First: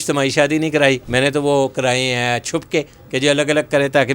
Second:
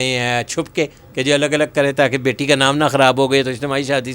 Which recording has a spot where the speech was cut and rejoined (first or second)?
first